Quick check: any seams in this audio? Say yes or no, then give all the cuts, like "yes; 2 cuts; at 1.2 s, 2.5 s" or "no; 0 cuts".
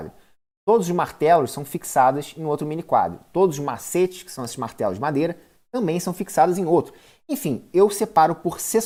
no; 0 cuts